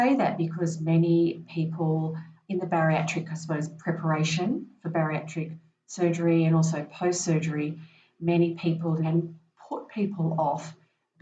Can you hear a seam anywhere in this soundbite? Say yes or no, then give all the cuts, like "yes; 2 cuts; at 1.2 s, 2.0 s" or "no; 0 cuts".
yes; 1 cut; at 9.0 s